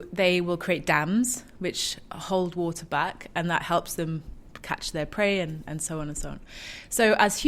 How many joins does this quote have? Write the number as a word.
zero